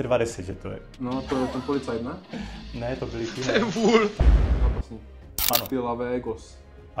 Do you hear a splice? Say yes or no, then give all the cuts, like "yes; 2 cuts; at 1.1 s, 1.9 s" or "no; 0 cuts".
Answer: yes; 1 cut; at 4.2 s